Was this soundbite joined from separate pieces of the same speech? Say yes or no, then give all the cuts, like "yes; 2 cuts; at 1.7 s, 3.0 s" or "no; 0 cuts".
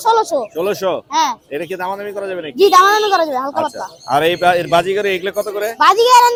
no; 0 cuts